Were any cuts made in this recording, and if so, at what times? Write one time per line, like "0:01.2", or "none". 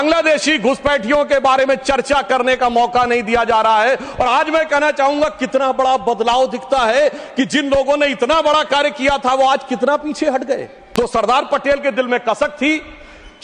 0:10.8

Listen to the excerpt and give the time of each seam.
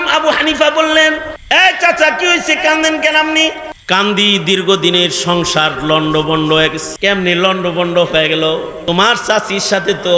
0:01.3
0:03.7
0:06.9
0:08.8

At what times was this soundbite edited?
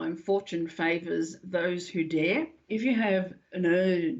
0:02.7

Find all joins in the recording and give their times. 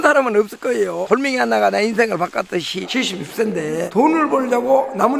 0:01.0
0:02.9

